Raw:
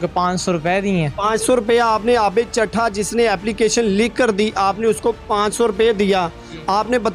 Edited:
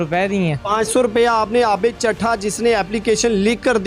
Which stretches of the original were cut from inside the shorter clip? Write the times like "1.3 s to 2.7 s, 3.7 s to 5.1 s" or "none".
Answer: none